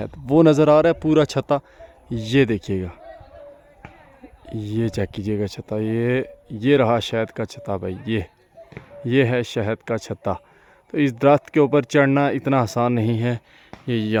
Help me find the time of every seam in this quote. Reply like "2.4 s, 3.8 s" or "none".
none